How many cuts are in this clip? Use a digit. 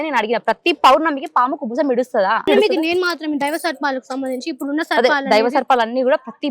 1